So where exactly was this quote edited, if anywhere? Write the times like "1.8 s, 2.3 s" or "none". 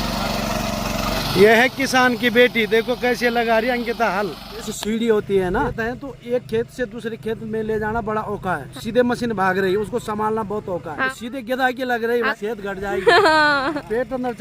1.2 s, 4.7 s, 5.7 s, 8.7 s, 11.0 s, 12.3 s